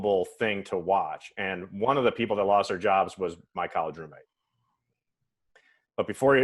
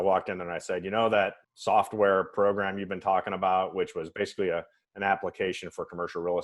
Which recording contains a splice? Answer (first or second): second